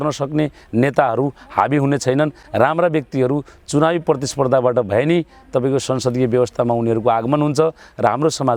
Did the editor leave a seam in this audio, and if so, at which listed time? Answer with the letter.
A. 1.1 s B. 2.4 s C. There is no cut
C